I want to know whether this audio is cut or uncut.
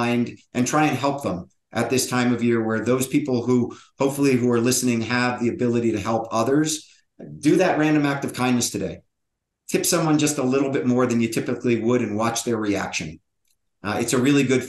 uncut